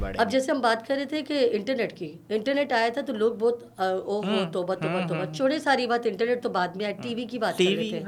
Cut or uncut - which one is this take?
uncut